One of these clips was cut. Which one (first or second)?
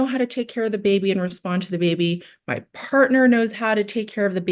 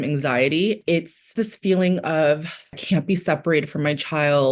second